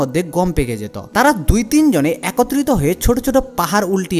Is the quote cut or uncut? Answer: cut